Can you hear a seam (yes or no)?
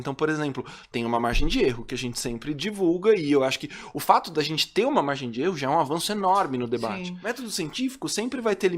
yes